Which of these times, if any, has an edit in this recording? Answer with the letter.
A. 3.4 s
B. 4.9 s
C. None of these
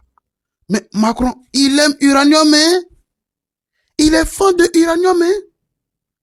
C